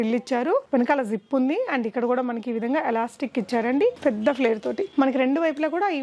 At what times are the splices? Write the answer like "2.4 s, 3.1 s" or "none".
4.0 s